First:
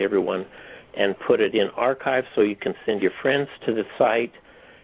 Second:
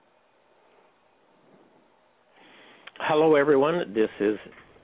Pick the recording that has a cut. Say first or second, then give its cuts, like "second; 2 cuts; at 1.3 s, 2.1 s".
first; 1 cut; at 3.0 s